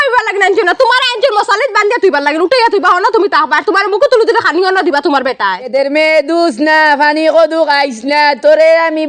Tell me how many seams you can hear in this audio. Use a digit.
1